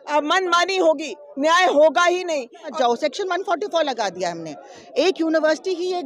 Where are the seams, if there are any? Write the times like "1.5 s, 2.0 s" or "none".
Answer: 2.7 s